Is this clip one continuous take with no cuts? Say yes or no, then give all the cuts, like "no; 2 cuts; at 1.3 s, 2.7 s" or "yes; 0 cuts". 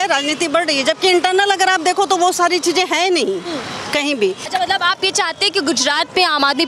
no; 1 cut; at 4.5 s